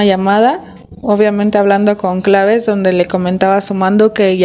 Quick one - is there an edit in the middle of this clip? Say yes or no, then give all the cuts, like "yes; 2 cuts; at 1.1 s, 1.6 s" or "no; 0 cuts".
no; 0 cuts